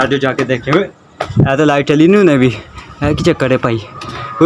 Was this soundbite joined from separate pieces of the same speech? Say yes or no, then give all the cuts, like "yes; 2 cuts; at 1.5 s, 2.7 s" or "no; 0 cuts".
no; 0 cuts